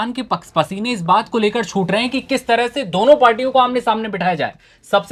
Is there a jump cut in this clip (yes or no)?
no